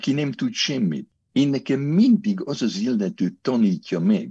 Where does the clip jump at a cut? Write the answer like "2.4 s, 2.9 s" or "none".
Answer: 1.1 s